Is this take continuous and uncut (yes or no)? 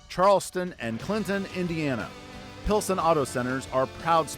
yes